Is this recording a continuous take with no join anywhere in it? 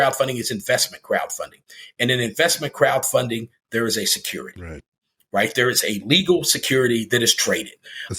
yes; 0 cuts

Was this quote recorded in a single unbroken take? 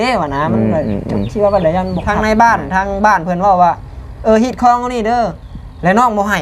no; 1 cut; at 2.0 s

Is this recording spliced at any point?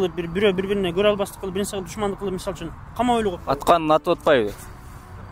no; 0 cuts

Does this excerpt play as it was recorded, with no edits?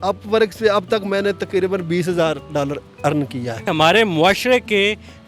no; 1 cut; at 3.7 s

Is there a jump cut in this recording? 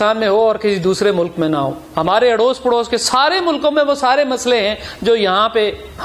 no; 0 cuts

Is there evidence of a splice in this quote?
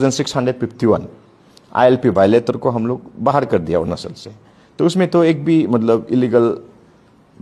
no; 0 cuts

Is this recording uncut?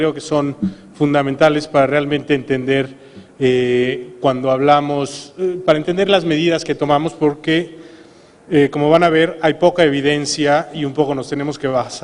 no; 1 cut; at 5.2 s

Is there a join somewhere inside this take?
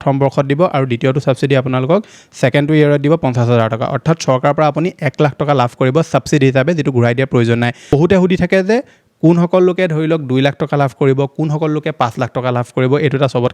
yes; 1 cut; at 7.9 s

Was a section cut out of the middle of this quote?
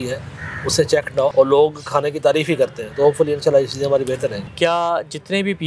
yes; 2 cuts; at 1.3 s, 4.4 s

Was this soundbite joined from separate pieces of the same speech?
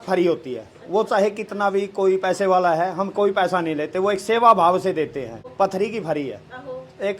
yes; 1 cut; at 5.4 s

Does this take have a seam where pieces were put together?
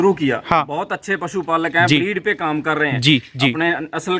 no; 0 cuts

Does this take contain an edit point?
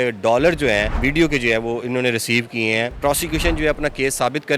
yes; 2 cuts; at 0.9 s, 2.9 s

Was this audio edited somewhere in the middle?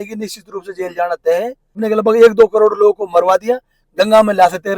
yes; 1 cut; at 1.8 s

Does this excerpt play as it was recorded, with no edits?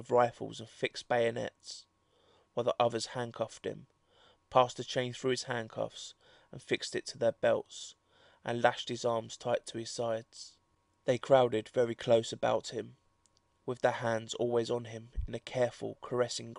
yes; 0 cuts

